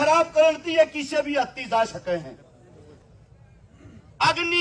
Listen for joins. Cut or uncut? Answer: cut